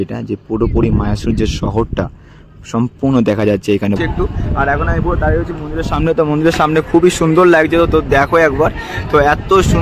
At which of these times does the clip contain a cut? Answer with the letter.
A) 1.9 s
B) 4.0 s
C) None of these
B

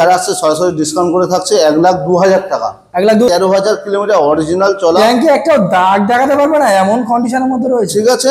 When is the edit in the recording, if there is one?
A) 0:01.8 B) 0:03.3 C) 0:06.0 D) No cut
B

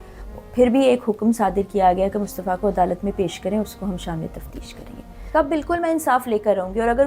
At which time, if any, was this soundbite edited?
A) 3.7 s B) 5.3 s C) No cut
B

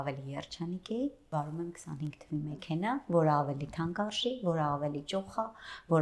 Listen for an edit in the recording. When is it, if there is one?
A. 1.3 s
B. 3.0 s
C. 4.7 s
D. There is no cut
A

